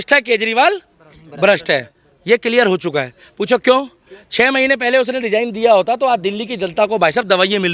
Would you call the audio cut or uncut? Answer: uncut